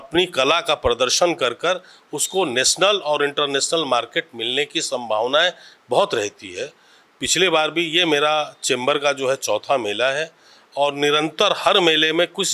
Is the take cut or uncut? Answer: uncut